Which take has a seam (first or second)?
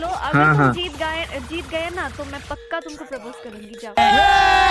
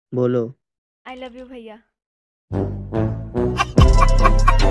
second